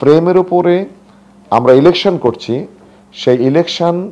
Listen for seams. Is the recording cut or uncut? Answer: uncut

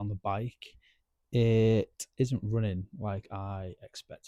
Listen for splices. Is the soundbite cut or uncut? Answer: uncut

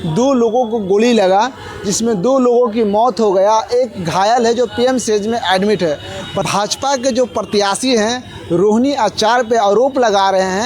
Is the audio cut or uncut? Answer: cut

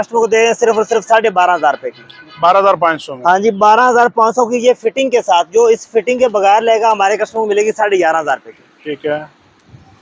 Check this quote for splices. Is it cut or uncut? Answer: uncut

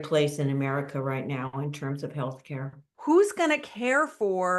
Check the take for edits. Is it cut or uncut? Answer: cut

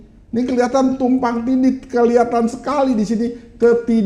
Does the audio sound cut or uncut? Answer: uncut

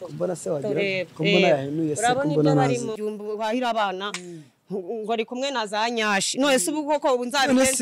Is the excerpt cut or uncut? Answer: cut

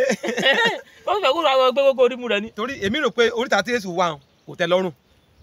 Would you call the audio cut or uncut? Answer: uncut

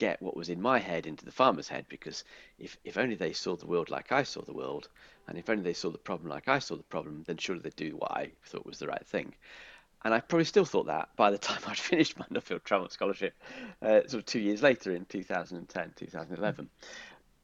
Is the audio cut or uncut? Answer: uncut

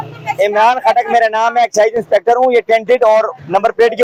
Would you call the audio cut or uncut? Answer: uncut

